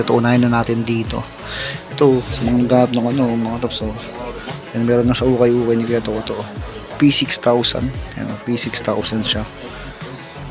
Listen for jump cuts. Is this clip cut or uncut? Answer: uncut